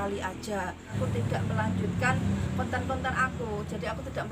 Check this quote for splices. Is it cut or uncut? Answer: cut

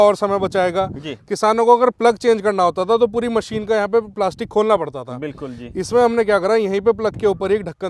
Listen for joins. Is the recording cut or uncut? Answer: uncut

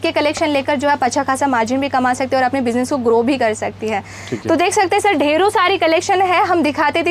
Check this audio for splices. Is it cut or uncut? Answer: uncut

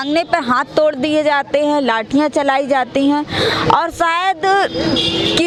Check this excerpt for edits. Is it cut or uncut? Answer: uncut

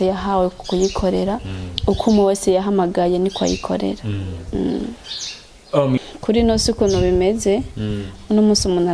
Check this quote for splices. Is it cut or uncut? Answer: cut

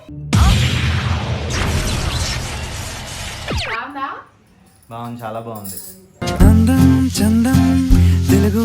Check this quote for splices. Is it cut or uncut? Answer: cut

